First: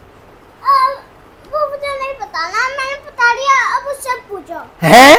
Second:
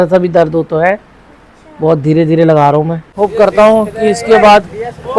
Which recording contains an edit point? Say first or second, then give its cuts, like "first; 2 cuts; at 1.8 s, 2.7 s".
second; 1 cut; at 3.0 s